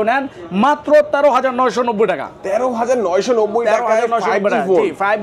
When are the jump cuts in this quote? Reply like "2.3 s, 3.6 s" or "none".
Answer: none